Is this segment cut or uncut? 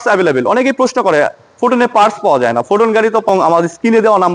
cut